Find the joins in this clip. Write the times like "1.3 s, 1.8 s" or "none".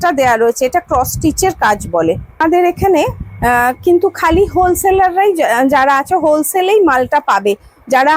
2.3 s

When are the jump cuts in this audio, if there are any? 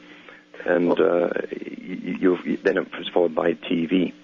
2.6 s

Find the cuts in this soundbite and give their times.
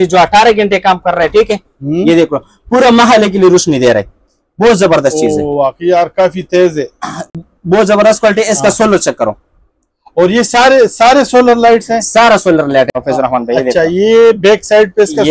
none

